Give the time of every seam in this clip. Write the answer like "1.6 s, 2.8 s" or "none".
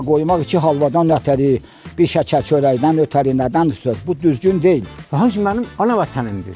4.9 s